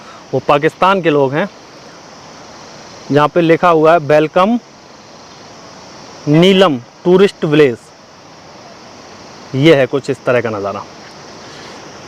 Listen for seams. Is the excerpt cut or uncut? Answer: uncut